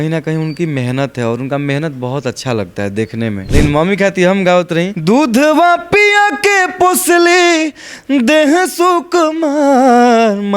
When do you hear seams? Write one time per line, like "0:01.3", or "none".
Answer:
0:03.4
0:04.9